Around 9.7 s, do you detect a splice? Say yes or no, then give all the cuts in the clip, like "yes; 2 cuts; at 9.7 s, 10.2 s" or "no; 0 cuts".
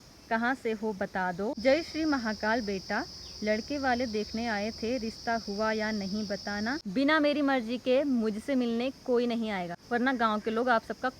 yes; 3 cuts; at 1.6 s, 6.8 s, 9.7 s